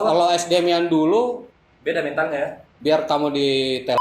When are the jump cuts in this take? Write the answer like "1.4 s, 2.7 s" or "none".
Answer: none